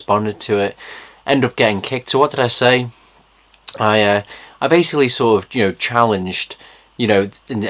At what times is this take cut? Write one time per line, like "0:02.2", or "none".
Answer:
0:05.1